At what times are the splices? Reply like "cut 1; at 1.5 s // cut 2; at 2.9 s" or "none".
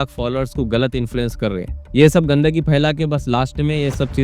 cut 1; at 1.8 s